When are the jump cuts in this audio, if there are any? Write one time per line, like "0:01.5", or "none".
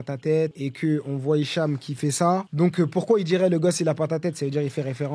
none